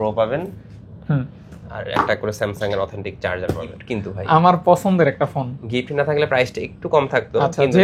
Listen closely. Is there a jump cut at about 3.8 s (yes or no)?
yes